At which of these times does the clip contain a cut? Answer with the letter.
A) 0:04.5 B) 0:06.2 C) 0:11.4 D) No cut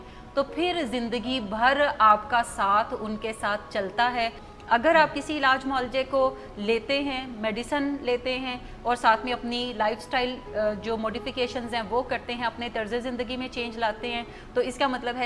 A